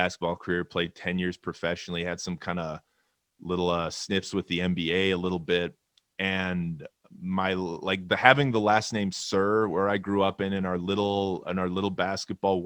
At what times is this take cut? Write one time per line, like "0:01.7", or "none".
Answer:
none